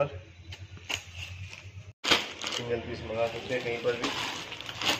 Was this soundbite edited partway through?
yes; 1 cut; at 2.1 s

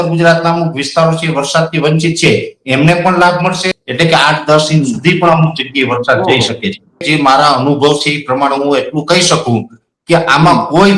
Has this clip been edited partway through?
yes; 2 cuts; at 3.8 s, 7.0 s

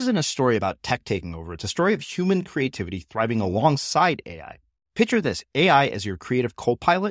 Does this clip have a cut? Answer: no; 0 cuts

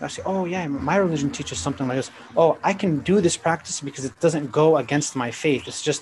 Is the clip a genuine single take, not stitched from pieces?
yes; 0 cuts

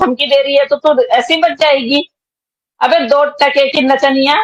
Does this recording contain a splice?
no; 0 cuts

